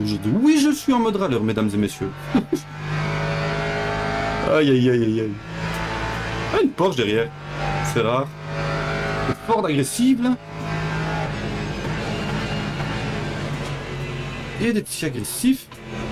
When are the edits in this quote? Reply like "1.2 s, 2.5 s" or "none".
none